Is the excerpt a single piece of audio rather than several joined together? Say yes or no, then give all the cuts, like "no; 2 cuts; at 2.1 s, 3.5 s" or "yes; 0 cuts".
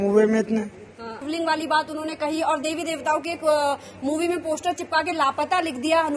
no; 1 cut; at 1.2 s